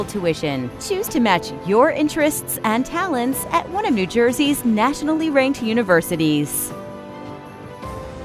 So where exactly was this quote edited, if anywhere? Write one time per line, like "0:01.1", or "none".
0:06.5